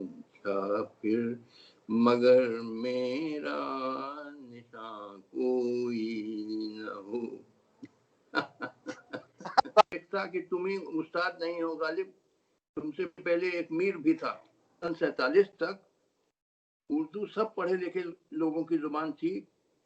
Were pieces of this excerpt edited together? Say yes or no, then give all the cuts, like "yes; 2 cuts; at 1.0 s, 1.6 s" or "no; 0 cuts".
yes; 2 cuts; at 9.9 s, 14.8 s